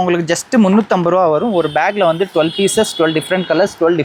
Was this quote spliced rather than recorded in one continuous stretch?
no; 0 cuts

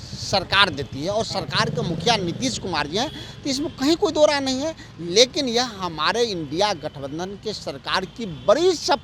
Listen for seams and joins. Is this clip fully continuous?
yes; 0 cuts

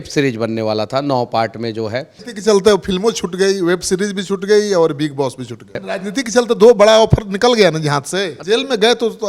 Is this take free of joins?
no; 3 cuts; at 2.3 s, 5.8 s, 8.3 s

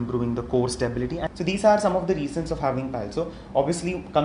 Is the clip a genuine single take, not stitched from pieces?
no; 1 cut; at 1.3 s

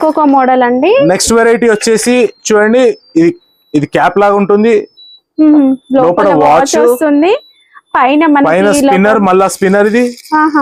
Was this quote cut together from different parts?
no; 0 cuts

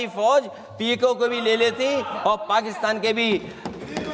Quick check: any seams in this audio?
no; 0 cuts

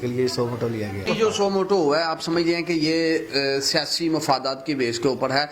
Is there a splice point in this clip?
yes; 1 cut; at 1.1 s

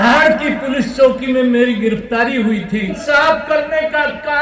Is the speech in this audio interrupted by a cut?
yes; 1 cut; at 3.0 s

